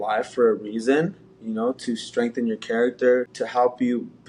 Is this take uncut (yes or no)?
no